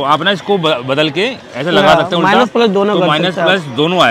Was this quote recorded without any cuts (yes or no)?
yes